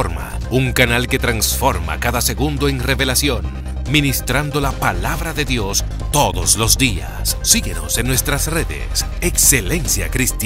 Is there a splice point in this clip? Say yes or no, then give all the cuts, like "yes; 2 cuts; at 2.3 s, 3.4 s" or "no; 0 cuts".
no; 0 cuts